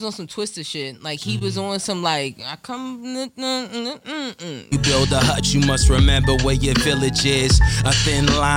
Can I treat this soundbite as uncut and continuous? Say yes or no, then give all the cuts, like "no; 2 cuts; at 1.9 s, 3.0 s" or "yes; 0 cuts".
no; 1 cut; at 4.7 s